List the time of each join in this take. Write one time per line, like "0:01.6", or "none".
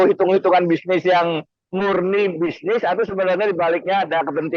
none